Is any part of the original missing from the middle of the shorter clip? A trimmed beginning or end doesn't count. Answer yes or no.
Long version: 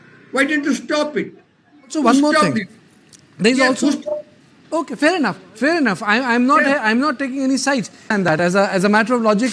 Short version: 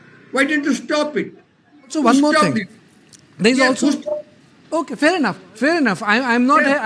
no